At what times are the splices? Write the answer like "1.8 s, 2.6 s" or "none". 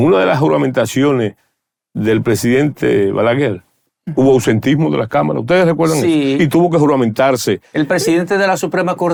none